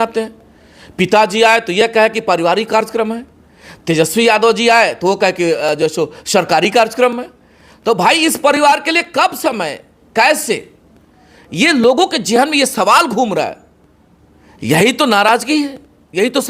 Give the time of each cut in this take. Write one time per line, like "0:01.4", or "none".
none